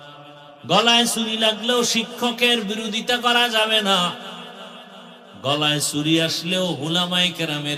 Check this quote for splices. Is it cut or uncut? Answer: uncut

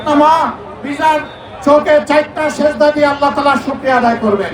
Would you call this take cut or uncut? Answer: uncut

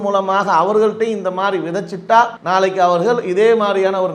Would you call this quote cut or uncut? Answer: cut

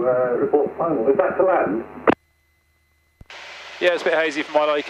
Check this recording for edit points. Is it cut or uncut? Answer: uncut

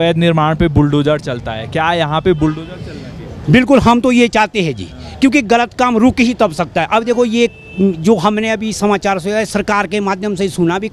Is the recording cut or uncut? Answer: uncut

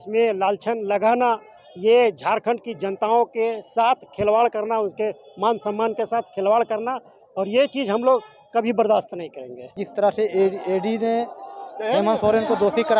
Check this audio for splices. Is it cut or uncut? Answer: cut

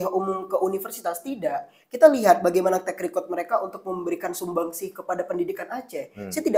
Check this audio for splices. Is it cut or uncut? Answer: uncut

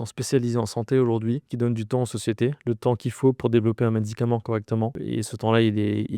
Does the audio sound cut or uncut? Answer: cut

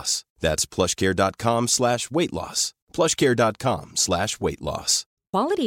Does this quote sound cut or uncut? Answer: uncut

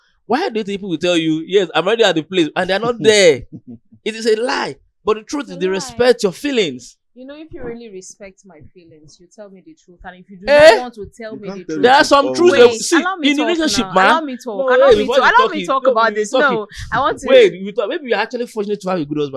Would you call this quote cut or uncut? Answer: uncut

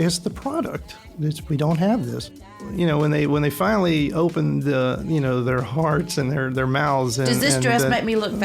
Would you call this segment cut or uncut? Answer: cut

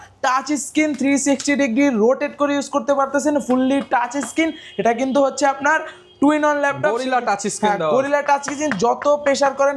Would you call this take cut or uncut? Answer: uncut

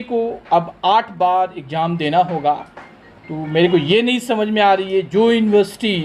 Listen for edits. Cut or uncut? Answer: uncut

